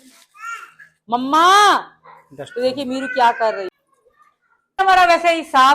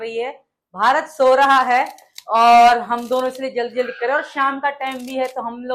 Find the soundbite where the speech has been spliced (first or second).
first